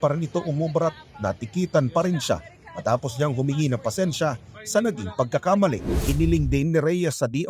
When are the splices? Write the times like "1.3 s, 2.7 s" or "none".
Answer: 5.9 s